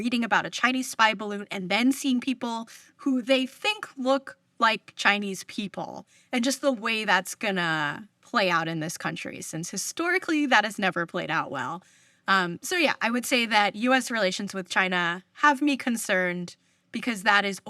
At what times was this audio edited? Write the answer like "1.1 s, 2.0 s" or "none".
none